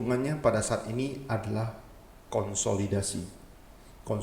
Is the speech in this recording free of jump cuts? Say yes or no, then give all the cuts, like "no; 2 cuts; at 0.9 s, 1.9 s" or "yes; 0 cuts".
yes; 0 cuts